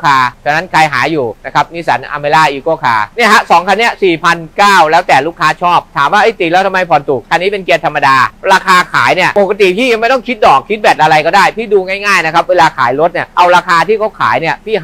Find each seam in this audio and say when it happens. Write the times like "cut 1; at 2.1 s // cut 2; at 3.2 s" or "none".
cut 1; at 1.4 s // cut 2; at 3.1 s // cut 3; at 7.2 s // cut 4; at 8.4 s // cut 5; at 9.3 s // cut 6; at 13.2 s